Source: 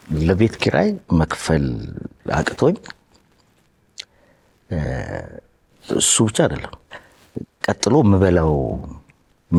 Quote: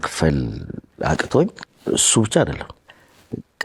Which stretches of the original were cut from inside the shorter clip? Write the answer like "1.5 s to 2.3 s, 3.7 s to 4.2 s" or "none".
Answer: 2.9 s to 5.7 s